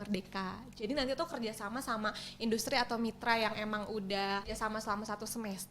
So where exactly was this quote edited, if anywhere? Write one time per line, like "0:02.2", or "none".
0:04.5